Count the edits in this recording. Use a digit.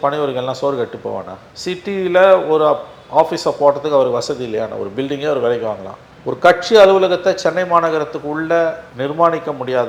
0